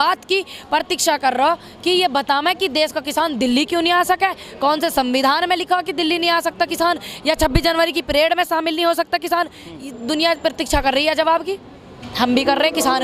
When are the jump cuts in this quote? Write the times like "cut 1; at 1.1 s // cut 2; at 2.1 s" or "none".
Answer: none